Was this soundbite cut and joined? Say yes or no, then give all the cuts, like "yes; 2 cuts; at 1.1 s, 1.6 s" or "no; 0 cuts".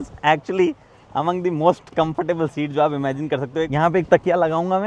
yes; 1 cut; at 3.7 s